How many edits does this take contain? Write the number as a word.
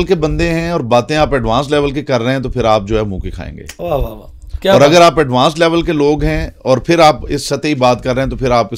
zero